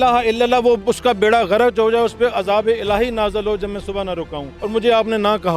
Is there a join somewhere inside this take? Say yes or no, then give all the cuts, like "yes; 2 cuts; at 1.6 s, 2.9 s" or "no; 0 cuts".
yes; 1 cut; at 4.5 s